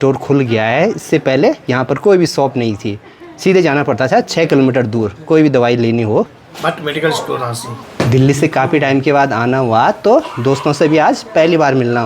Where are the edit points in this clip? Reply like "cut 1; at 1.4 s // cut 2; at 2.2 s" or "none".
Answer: none